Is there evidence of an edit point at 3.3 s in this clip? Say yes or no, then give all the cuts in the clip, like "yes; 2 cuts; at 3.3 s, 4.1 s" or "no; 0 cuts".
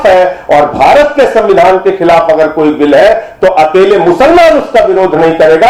no; 0 cuts